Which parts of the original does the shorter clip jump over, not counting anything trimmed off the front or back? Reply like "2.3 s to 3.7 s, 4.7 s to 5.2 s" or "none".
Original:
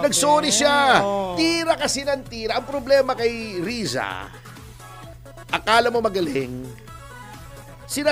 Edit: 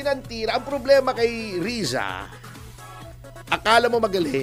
none